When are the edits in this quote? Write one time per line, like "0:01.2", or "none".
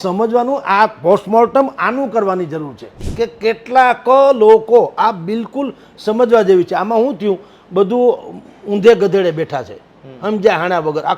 0:03.1